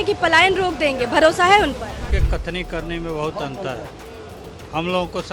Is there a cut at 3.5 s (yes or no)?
no